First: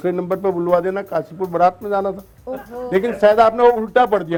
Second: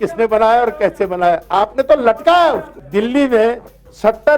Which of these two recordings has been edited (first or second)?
second